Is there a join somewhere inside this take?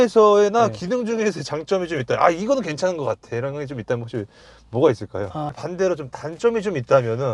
yes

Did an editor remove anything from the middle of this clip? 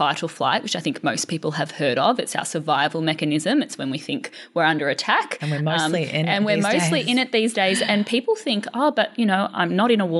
no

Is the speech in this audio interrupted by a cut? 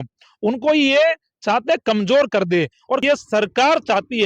yes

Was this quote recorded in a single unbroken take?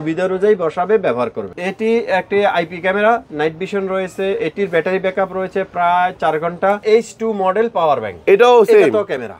no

